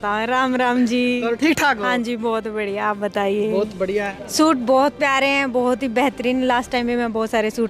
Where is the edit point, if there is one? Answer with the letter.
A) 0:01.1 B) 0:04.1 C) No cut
B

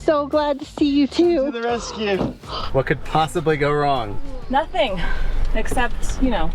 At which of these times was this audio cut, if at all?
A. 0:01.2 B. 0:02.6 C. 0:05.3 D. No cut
B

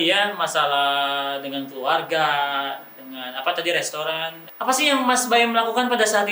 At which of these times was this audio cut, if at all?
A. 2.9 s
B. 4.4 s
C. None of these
B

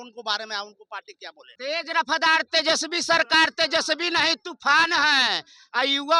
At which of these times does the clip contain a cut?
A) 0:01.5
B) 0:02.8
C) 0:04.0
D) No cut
A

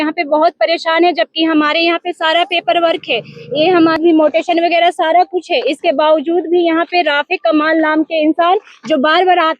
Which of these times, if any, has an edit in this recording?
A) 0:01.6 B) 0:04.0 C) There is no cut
B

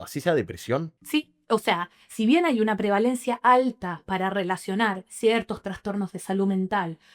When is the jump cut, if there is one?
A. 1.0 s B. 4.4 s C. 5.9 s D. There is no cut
A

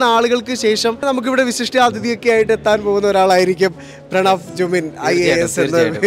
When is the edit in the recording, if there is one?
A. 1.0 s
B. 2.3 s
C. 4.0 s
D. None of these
A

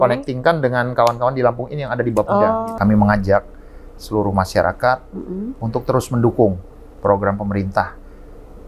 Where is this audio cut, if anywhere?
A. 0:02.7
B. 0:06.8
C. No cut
A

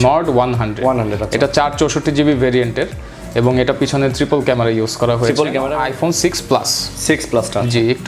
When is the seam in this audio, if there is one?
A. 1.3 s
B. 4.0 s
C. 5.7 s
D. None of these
C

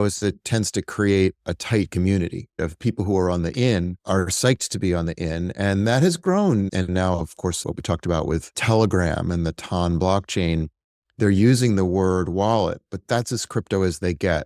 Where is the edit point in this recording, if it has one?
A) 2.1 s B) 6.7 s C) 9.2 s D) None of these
B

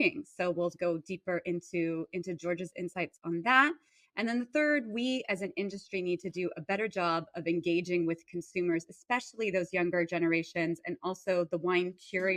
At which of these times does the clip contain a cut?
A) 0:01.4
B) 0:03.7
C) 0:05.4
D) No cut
D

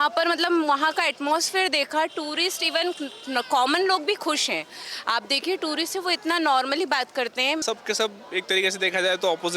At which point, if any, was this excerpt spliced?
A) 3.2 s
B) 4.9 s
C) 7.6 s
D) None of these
C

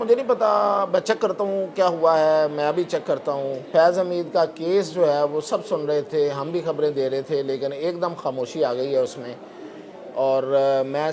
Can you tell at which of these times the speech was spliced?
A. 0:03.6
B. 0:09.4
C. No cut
A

